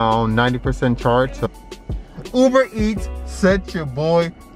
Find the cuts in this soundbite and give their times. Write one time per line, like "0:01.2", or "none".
0:01.5